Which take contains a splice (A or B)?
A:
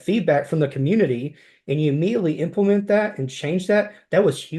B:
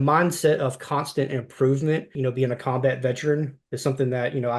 B